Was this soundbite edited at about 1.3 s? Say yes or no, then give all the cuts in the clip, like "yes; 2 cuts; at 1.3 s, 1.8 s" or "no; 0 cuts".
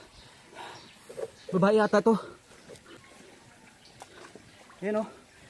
no; 1 cut; at 3.0 s